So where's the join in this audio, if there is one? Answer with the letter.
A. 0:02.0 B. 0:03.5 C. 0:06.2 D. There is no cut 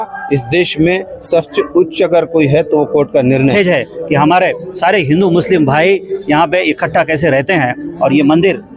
B